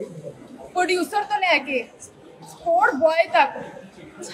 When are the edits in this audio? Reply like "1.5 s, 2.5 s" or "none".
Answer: none